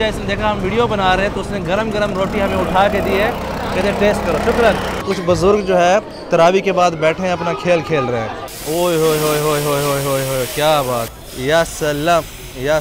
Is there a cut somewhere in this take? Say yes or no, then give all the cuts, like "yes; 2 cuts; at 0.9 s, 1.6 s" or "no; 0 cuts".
yes; 3 cuts; at 5.0 s, 8.5 s, 11.2 s